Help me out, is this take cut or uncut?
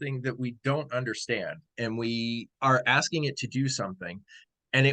cut